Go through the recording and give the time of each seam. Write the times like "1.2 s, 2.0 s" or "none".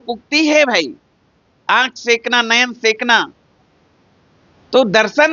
none